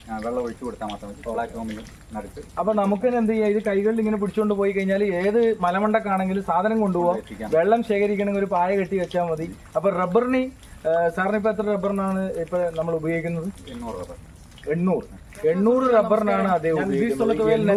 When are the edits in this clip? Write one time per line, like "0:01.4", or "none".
none